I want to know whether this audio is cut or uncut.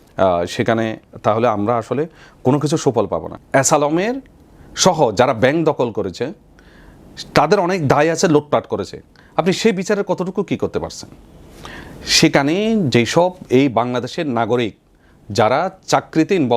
cut